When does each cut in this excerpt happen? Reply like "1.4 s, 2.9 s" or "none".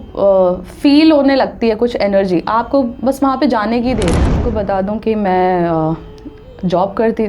4.4 s